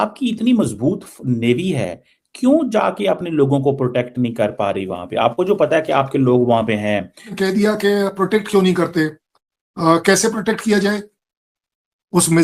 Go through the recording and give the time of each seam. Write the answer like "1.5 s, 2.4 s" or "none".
7.3 s